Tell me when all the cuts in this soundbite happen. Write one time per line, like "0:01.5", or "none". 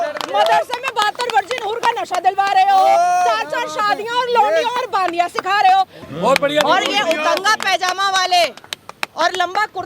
0:06.0